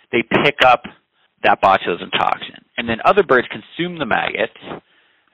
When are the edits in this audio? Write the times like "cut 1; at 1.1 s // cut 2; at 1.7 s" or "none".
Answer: cut 1; at 1.3 s